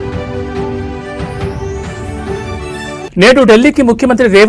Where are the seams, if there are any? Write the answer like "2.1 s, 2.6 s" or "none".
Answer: none